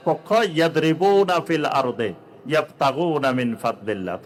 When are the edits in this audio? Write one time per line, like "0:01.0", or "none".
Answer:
none